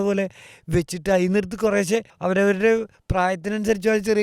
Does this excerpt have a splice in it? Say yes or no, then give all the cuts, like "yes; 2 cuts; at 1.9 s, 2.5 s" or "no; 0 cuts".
yes; 2 cuts; at 2.1 s, 3.0 s